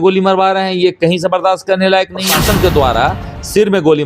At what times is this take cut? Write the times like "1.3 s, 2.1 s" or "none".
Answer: 2.3 s